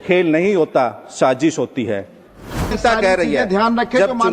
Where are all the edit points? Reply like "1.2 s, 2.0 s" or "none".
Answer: 2.8 s